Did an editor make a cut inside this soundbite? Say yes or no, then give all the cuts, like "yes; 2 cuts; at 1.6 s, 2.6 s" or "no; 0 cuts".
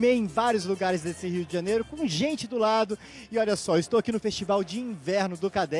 no; 0 cuts